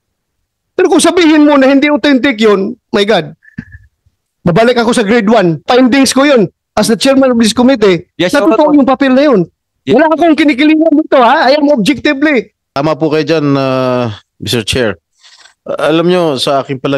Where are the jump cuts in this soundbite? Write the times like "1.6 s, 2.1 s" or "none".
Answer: 5.7 s, 12.6 s